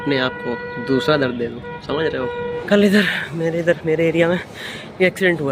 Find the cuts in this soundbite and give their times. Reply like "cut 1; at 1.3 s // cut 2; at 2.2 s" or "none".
cut 1; at 2.5 s

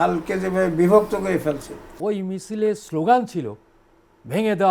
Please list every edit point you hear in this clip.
cut 1; at 2.0 s

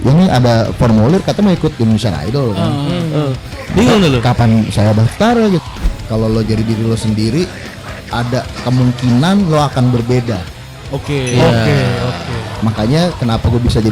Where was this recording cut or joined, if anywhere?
cut 1; at 3.5 s // cut 2; at 5.6 s

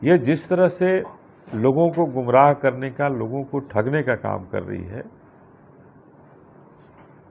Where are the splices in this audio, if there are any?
none

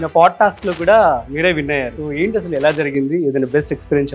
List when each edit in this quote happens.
cut 1; at 1.9 s

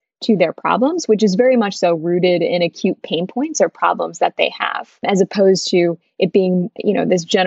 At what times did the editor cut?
none

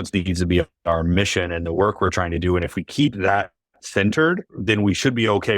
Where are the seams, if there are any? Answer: cut 1; at 4.6 s

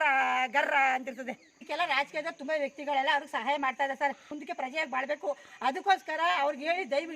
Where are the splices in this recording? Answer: cut 1; at 1.6 s // cut 2; at 4.3 s

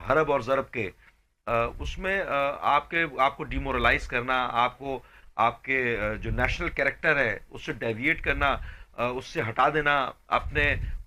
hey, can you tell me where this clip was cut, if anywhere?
none

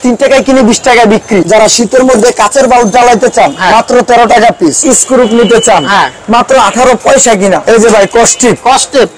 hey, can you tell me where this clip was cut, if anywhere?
cut 1; at 1.4 s // cut 2; at 4.8 s // cut 3; at 7.6 s

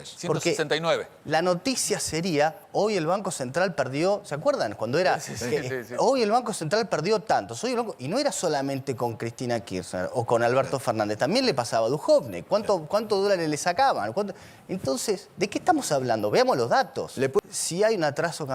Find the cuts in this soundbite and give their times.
cut 1; at 17.4 s

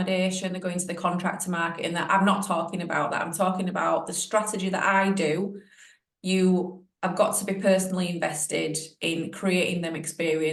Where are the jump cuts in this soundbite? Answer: none

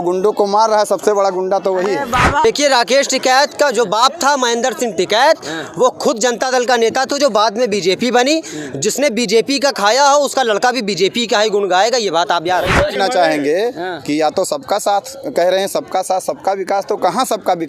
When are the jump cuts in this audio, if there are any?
cut 1; at 2.4 s // cut 2; at 12.9 s

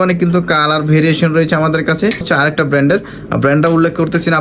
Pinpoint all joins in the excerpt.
cut 1; at 2.2 s

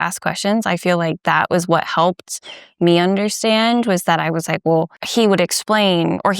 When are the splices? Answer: cut 1; at 5.0 s

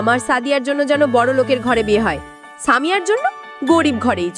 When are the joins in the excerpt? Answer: none

